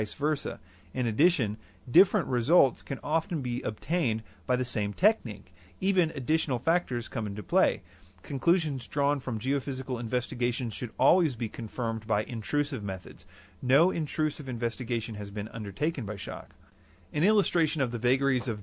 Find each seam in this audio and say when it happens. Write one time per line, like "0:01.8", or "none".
0:17.2